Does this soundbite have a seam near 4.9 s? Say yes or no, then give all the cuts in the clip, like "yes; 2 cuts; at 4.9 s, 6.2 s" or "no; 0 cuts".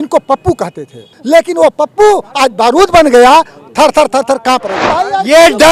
yes; 2 cuts; at 1.1 s, 4.9 s